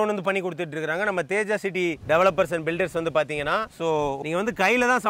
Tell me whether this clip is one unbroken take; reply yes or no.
yes